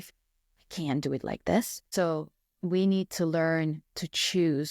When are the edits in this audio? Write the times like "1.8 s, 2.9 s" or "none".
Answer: 1.8 s